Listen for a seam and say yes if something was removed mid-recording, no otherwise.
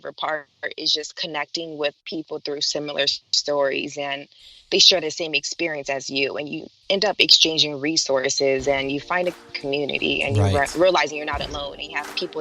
no